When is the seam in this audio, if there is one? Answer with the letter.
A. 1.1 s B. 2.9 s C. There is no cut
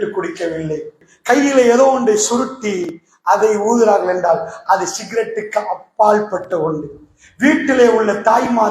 A